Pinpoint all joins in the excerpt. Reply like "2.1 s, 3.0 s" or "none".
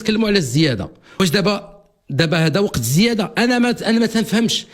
1.2 s

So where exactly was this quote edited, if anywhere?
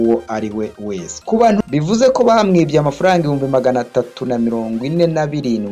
1.6 s

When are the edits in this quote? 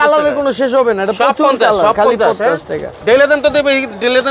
none

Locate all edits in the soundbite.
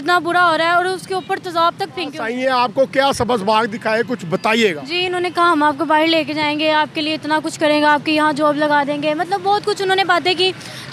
2.2 s

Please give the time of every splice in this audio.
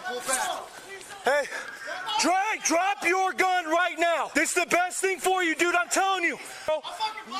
4.3 s, 6.7 s

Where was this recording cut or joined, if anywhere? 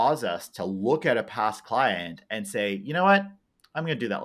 none

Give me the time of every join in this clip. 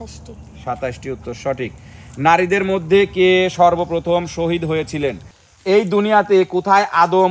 5.3 s

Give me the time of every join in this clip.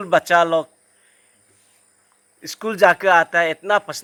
none

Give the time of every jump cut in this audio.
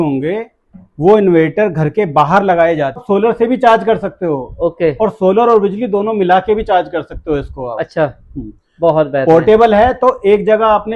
3.0 s

